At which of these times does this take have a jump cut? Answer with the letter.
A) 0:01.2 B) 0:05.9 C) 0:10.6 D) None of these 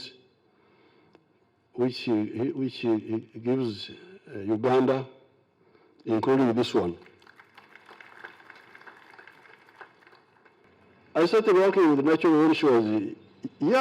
C